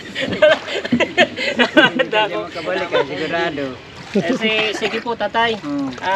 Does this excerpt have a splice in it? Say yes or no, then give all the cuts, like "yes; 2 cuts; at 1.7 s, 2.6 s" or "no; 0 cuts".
yes; 1 cut; at 3.9 s